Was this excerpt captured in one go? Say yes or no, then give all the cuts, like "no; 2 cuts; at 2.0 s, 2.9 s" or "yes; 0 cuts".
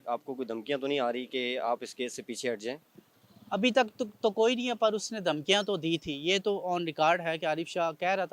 yes; 0 cuts